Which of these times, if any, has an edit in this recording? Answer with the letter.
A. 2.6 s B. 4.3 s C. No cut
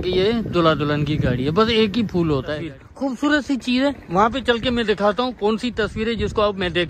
A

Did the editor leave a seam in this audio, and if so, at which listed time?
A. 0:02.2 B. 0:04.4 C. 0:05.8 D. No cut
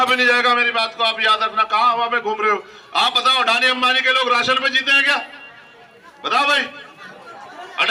D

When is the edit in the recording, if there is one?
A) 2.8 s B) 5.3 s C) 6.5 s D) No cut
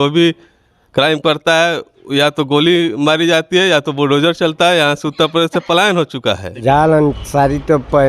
C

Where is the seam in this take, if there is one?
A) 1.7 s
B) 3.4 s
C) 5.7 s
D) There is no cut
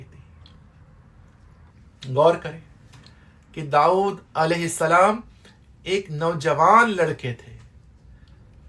A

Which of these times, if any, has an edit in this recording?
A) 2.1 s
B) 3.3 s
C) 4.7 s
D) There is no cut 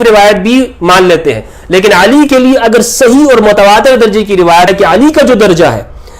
C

